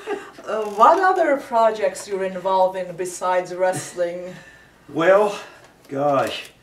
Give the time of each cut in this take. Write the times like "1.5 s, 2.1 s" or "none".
2.8 s